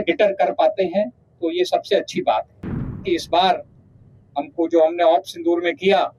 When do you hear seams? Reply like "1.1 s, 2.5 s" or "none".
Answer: 3.0 s